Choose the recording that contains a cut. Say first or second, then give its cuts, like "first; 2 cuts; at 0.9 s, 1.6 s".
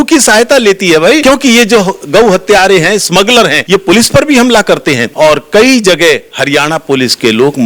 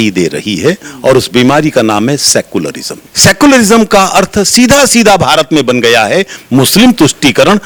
first; 3 cuts; at 1.2 s, 3.6 s, 5.1 s